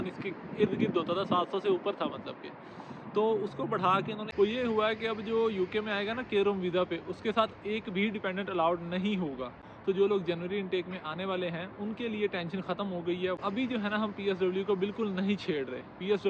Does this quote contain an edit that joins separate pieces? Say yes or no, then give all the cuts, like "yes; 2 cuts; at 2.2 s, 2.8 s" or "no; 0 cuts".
yes; 3 cuts; at 4.2 s, 9.7 s, 13.4 s